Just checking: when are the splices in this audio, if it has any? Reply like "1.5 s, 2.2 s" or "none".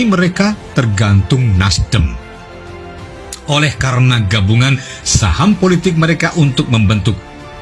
none